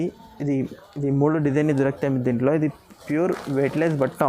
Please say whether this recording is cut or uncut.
uncut